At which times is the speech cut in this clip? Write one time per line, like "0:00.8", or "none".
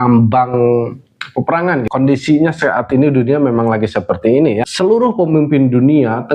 0:01.9
0:04.7